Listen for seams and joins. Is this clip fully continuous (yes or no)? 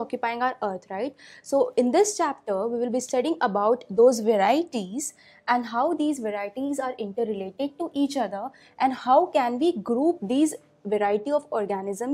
no